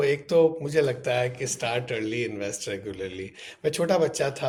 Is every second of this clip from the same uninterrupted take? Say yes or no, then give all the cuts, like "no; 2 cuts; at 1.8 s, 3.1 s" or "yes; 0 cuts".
yes; 0 cuts